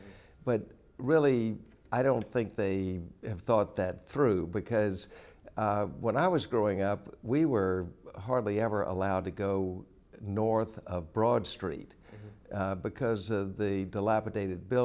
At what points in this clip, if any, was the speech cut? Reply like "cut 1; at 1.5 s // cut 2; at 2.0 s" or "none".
cut 1; at 4.7 s